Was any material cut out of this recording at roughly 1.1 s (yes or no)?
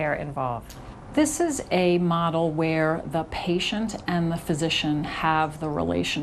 yes